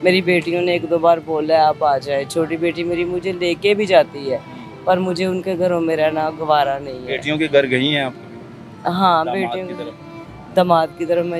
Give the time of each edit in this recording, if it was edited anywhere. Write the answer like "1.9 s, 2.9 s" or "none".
none